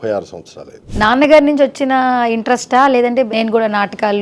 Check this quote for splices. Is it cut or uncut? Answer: cut